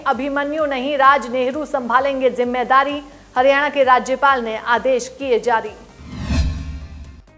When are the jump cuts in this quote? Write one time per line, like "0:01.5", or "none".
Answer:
0:06.0